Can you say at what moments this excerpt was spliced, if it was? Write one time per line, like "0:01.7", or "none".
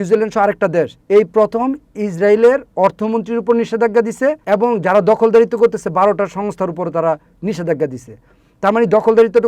0:01.0
0:04.4